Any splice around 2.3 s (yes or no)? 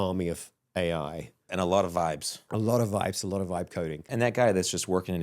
yes